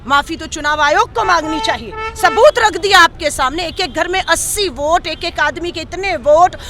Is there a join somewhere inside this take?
no; 0 cuts

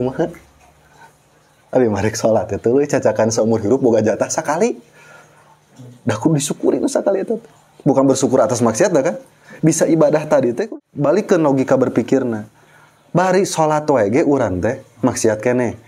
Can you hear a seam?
yes; 1 cut; at 10.6 s

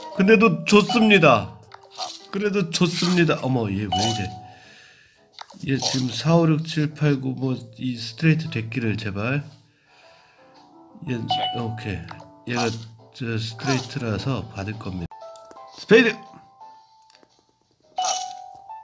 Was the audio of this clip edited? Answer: yes; 1 cut; at 15.1 s

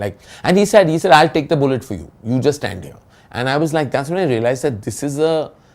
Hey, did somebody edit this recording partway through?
no; 0 cuts

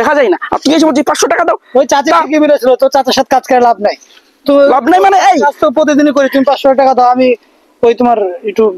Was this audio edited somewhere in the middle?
no; 0 cuts

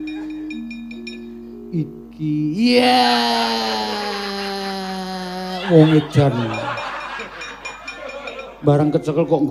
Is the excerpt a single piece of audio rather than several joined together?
yes; 0 cuts

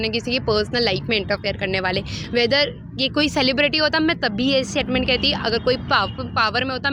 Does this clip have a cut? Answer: no; 0 cuts

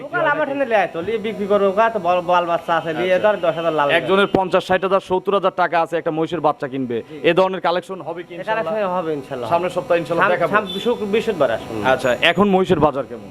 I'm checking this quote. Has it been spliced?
no; 0 cuts

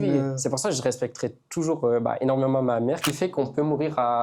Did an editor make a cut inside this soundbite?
yes; 1 cut; at 3.0 s

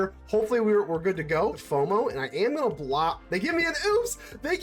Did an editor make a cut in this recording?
yes; 1 cut; at 1.6 s

